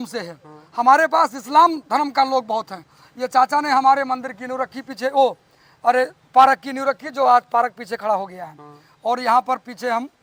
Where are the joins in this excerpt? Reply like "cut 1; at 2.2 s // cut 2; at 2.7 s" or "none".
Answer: none